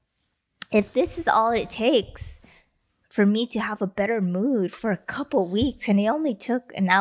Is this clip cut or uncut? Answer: uncut